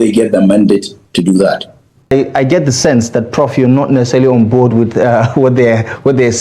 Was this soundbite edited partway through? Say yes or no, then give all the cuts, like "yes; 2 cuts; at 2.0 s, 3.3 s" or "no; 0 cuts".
yes; 1 cut; at 2.1 s